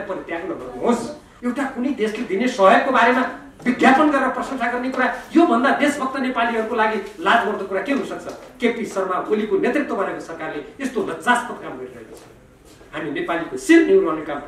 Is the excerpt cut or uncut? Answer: cut